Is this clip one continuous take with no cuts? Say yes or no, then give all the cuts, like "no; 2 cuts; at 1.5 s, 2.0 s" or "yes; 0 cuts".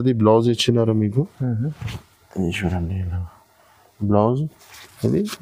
yes; 0 cuts